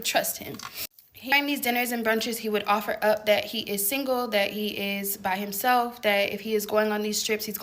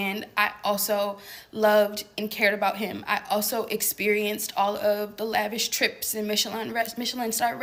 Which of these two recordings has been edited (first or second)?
first